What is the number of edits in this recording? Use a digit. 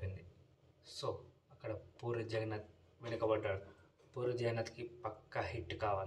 0